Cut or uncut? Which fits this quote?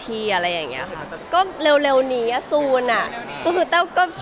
cut